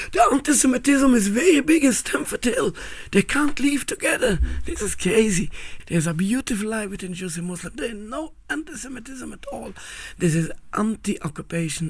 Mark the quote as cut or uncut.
cut